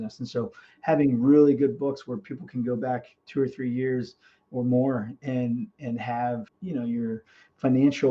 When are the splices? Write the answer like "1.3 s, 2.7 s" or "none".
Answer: 6.5 s